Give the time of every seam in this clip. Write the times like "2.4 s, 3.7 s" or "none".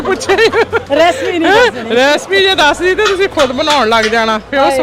none